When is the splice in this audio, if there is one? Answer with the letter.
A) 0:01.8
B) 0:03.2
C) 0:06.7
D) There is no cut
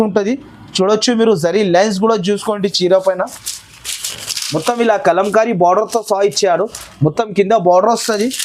B